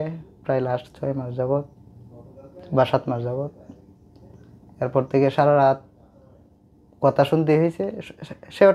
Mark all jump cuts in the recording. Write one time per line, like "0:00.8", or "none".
none